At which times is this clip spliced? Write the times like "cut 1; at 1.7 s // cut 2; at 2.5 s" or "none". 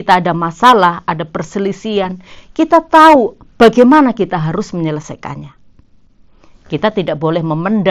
none